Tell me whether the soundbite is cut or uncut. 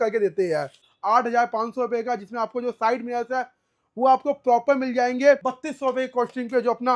cut